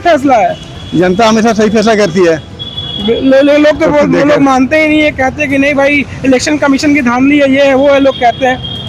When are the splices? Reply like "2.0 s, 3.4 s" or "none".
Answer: none